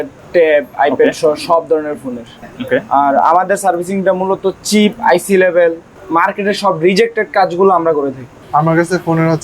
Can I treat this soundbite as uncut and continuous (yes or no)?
no